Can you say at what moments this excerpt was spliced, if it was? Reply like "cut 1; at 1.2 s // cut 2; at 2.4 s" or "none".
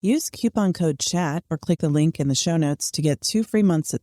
cut 1; at 1.7 s

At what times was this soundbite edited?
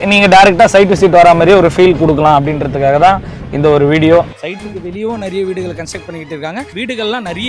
cut 1; at 4.4 s // cut 2; at 6.7 s

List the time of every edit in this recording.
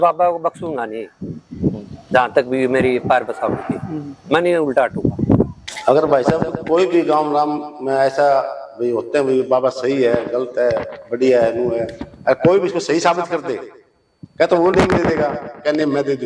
cut 1; at 5.6 s

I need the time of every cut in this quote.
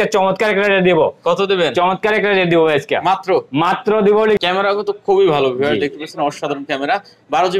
cut 1; at 4.4 s

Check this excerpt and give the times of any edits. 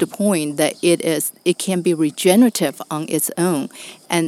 none

